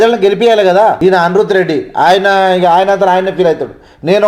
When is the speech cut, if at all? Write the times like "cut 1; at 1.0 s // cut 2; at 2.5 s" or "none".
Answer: cut 1; at 1.0 s